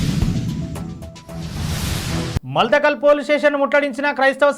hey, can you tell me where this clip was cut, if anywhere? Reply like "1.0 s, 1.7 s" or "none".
2.4 s